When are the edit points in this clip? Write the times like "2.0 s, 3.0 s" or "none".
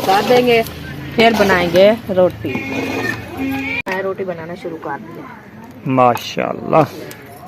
3.9 s